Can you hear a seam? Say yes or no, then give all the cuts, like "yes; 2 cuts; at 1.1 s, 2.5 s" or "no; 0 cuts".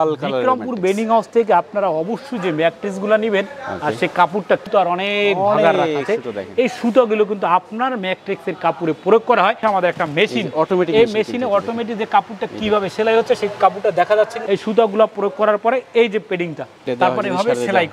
yes; 4 cuts; at 4.6 s, 9.6 s, 14.4 s, 16.8 s